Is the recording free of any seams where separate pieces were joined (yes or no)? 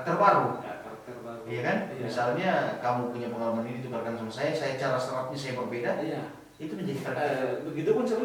yes